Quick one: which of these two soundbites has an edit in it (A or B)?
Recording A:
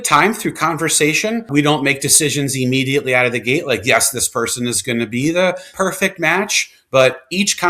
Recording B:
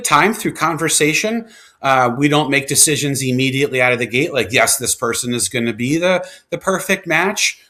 A